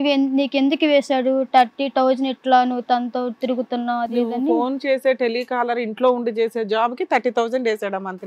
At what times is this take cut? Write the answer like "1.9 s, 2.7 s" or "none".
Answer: none